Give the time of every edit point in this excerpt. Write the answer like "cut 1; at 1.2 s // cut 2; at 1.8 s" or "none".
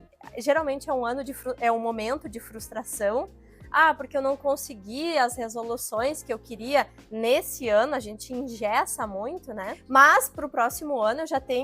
cut 1; at 9.8 s